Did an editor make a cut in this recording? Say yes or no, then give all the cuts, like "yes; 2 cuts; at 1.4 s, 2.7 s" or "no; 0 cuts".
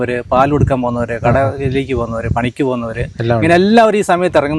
no; 0 cuts